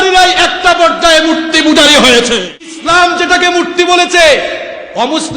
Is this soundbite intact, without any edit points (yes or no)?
no